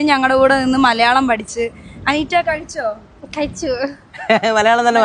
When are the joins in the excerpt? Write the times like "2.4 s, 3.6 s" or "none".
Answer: none